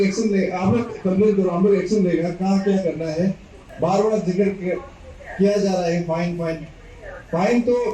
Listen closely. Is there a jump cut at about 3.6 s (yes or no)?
yes